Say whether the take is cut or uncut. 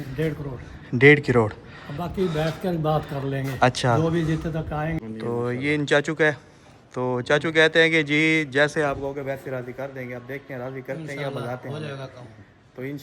cut